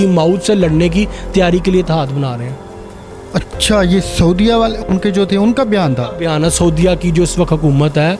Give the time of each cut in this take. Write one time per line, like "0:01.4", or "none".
none